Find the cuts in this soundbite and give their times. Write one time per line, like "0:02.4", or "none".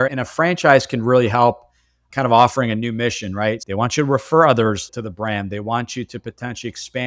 0:03.6